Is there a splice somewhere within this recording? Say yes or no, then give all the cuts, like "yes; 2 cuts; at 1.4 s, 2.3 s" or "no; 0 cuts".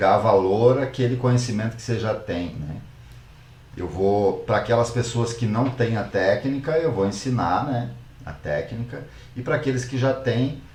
no; 0 cuts